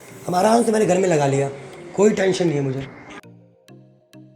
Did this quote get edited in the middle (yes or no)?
yes